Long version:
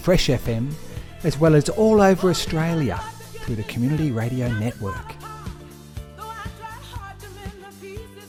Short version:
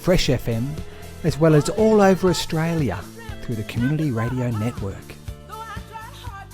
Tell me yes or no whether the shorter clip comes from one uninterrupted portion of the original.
no